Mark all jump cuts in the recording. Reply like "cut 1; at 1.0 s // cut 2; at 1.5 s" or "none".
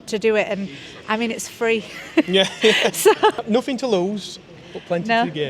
cut 1; at 3.4 s